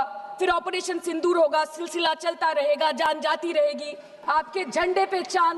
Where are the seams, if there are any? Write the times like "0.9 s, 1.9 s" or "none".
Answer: 4.1 s